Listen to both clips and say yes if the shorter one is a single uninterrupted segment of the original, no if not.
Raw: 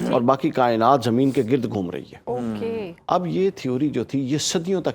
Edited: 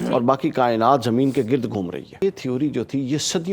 no